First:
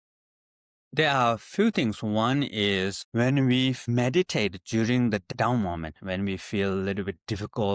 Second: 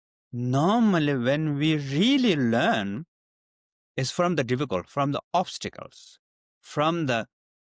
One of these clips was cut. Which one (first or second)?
first